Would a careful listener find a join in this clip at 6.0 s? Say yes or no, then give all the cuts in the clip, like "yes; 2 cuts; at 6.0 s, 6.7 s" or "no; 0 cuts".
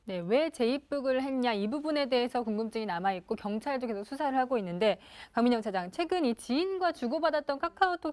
yes; 1 cut; at 6.0 s